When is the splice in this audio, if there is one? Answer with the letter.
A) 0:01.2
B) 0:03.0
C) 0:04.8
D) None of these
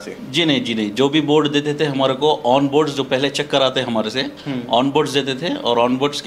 D